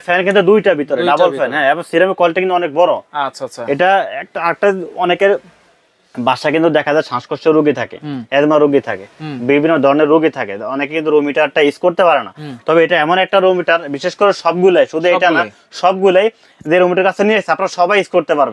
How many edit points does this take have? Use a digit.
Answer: 0